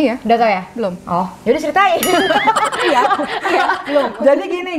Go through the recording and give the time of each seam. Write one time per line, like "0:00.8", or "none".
none